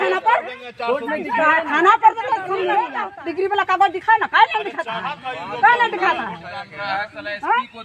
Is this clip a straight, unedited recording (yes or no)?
no